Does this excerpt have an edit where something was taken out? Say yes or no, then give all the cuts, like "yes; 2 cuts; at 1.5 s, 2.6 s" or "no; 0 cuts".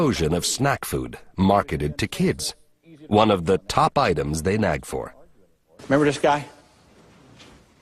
yes; 1 cut; at 5.3 s